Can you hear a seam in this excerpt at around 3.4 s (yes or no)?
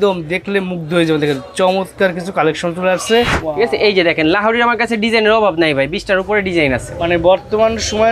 yes